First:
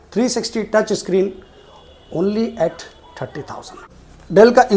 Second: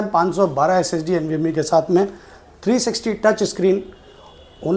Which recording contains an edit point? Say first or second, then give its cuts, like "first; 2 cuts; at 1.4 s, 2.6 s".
first; 1 cut; at 3.8 s